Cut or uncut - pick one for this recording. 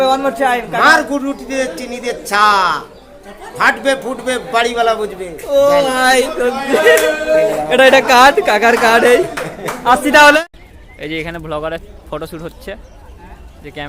cut